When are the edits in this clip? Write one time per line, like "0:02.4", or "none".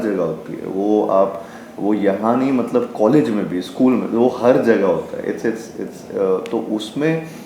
none